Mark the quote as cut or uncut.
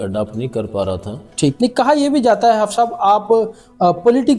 cut